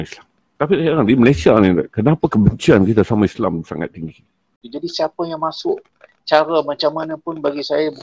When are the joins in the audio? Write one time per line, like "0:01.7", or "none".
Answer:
0:04.6